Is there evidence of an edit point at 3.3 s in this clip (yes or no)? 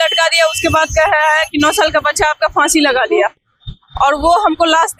no